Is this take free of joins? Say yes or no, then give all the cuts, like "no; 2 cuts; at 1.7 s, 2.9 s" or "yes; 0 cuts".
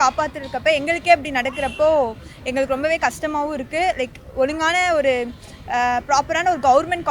yes; 0 cuts